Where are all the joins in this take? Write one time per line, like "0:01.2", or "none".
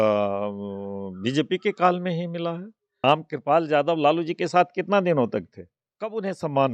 0:03.0